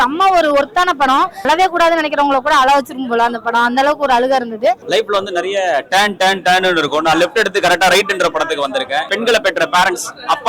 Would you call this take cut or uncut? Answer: cut